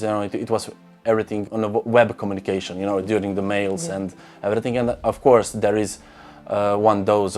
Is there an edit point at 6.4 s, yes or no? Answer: no